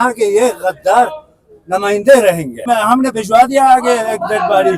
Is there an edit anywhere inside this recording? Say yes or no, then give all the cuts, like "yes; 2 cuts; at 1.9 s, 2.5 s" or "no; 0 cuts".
yes; 1 cut; at 2.6 s